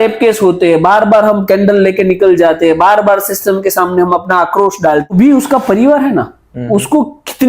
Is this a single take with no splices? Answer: no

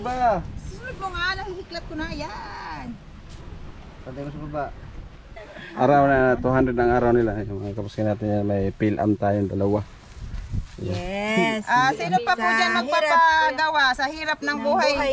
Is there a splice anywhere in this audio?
yes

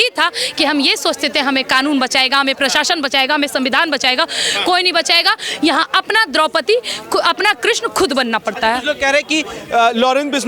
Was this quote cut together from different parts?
no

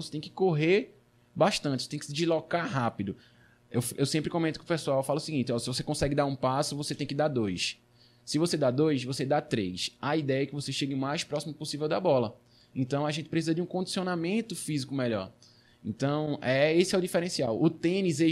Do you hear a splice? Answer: no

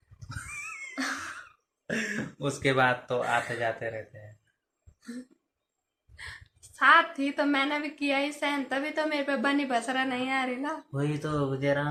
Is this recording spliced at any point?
no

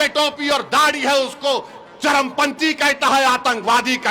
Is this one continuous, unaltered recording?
yes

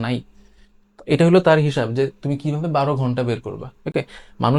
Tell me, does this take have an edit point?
no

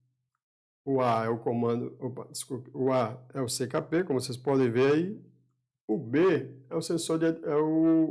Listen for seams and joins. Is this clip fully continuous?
yes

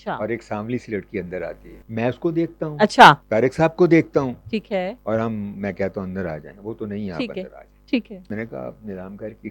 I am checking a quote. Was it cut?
yes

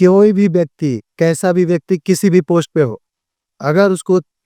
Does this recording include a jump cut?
no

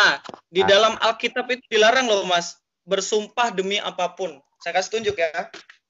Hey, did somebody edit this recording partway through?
no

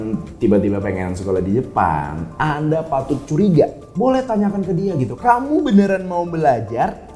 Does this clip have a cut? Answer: yes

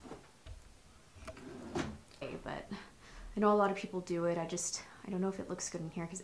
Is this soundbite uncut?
no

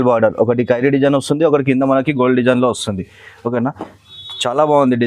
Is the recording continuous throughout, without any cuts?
yes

